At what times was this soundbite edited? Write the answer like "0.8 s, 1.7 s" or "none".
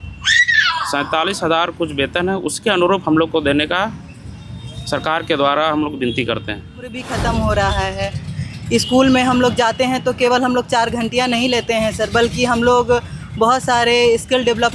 7.1 s